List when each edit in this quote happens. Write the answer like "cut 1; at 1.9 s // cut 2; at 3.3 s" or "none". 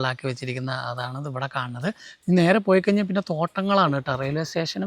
none